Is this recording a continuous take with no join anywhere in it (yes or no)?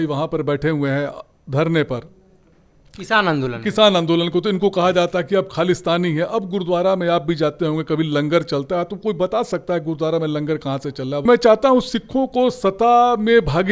no